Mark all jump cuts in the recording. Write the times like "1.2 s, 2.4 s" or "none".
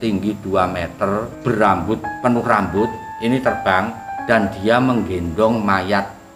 1.3 s, 2.1 s, 3.1 s, 4.1 s